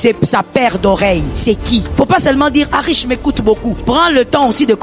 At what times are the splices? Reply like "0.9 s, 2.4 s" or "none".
1.6 s, 3.8 s